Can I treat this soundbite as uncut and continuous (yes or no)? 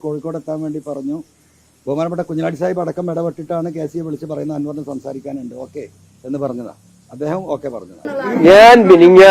no